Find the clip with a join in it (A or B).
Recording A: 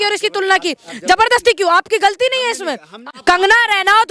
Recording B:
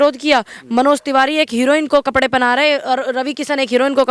A